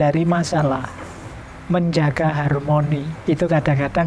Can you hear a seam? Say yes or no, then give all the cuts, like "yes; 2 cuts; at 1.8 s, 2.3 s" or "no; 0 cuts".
no; 0 cuts